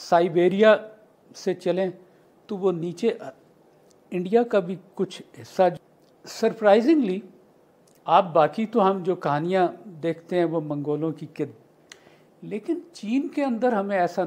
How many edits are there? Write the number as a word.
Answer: two